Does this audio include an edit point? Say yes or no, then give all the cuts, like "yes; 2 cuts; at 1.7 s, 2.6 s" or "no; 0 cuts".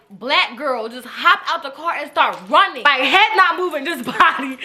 yes; 1 cut; at 2.8 s